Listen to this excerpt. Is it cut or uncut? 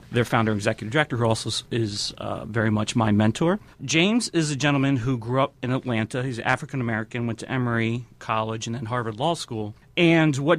cut